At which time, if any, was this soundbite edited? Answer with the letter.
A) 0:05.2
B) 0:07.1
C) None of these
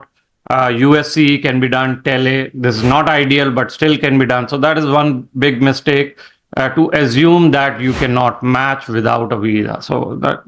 C